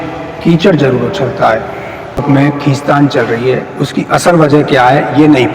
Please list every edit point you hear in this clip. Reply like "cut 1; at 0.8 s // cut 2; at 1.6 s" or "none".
cut 1; at 2.2 s